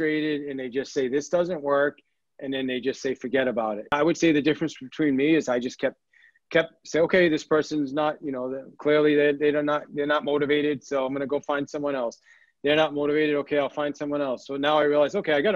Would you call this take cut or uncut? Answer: cut